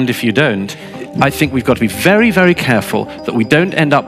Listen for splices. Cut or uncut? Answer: cut